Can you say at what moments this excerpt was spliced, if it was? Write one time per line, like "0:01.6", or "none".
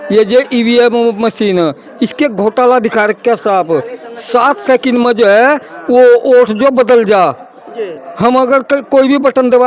none